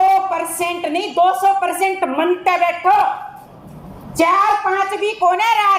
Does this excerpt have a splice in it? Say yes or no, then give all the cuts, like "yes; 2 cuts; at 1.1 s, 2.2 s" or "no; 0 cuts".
no; 0 cuts